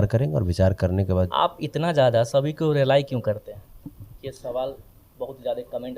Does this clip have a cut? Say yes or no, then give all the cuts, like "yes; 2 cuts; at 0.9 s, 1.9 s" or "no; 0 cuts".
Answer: yes; 1 cut; at 1.3 s